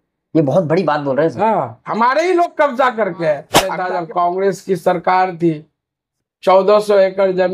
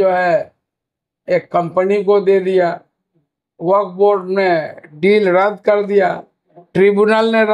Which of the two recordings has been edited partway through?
first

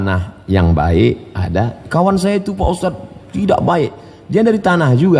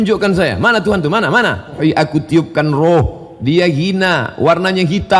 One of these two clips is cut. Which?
second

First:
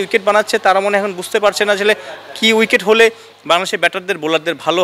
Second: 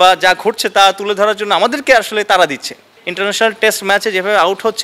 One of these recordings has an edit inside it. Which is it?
second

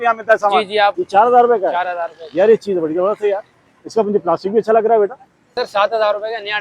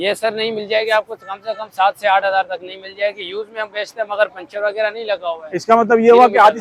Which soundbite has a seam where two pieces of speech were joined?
first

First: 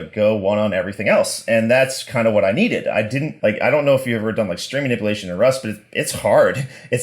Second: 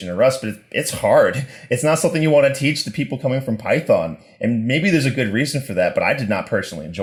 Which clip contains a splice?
first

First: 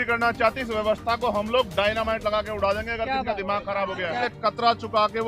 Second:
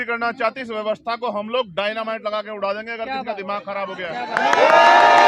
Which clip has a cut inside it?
first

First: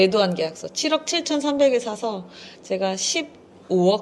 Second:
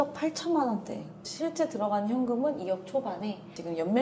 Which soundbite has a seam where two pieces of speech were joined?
second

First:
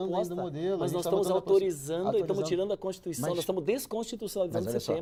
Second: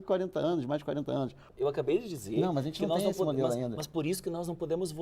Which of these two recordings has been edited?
second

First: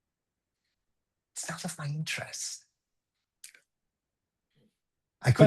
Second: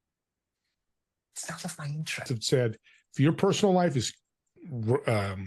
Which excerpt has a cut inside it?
second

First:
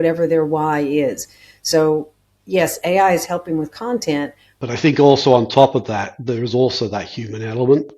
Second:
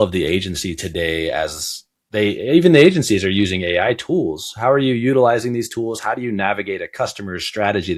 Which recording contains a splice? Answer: first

